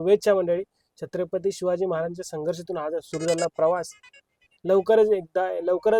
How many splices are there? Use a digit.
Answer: 0